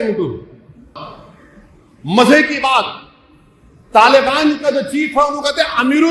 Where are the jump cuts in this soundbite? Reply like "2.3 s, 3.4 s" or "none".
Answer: 0.9 s